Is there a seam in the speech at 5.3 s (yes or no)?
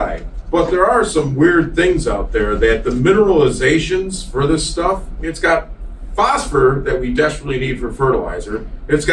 yes